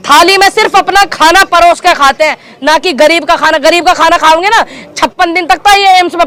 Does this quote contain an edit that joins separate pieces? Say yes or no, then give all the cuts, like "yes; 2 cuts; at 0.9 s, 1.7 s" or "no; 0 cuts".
no; 0 cuts